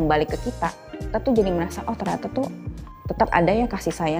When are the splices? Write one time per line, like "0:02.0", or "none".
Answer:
none